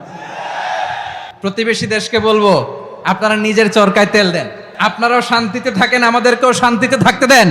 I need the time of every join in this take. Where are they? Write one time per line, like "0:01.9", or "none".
0:01.3
0:04.6